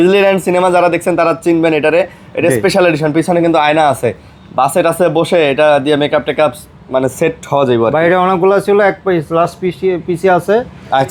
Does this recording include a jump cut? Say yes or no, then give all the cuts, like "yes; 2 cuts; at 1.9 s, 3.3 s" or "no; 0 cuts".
no; 0 cuts